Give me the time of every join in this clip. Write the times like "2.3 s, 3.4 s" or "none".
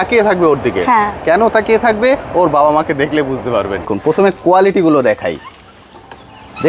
3.9 s